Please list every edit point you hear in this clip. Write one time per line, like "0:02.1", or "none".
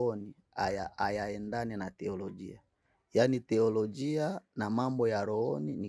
none